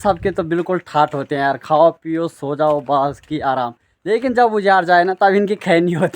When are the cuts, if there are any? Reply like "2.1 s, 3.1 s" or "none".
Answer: none